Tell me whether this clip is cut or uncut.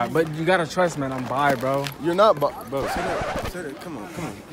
uncut